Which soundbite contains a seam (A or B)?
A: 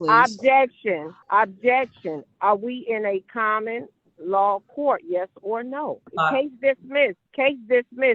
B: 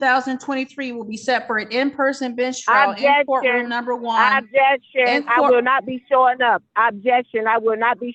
A